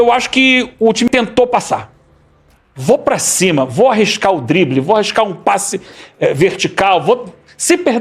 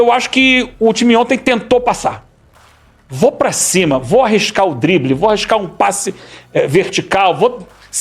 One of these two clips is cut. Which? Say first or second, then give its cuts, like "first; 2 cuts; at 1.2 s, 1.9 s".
first; 1 cut; at 1.1 s